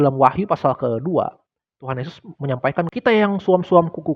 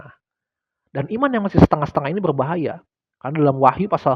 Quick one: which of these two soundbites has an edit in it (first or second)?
first